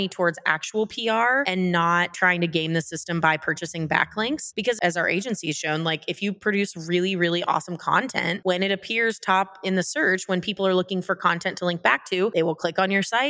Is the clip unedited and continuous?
no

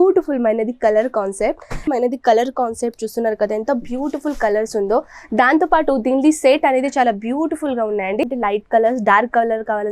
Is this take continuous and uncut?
no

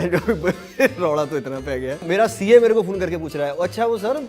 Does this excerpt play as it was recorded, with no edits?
no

